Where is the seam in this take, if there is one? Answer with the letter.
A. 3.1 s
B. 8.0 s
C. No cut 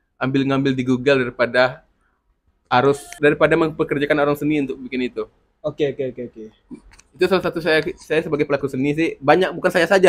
A